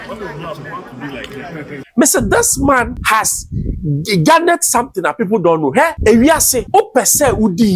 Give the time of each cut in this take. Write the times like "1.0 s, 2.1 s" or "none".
1.8 s, 3.0 s, 6.0 s, 6.5 s